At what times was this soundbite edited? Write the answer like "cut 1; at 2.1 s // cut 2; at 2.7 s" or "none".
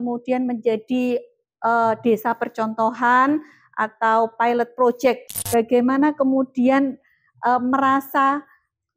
cut 1; at 5.3 s